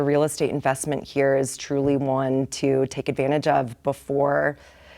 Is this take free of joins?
yes; 0 cuts

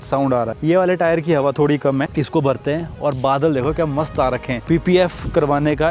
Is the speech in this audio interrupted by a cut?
yes; 1 cut; at 4.6 s

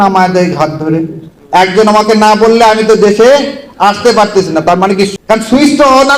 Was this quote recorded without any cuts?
no; 2 cuts; at 1.3 s, 5.2 s

